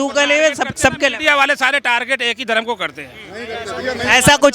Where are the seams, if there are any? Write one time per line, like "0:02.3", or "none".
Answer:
none

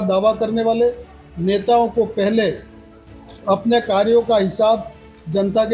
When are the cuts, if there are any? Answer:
none

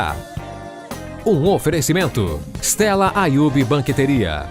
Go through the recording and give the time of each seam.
0:02.4

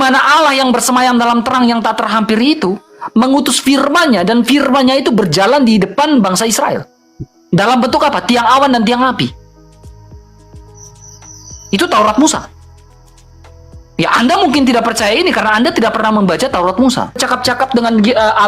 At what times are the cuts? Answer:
0:17.2

